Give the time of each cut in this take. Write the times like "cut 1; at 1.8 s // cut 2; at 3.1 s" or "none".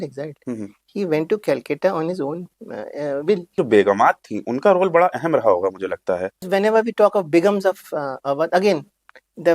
cut 1; at 3.6 s // cut 2; at 6.4 s